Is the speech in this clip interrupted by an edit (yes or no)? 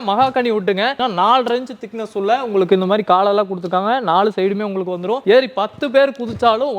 yes